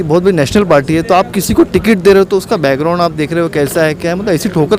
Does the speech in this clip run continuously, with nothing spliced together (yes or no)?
yes